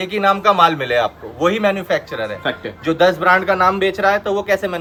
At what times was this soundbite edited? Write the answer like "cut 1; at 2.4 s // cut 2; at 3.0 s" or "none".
none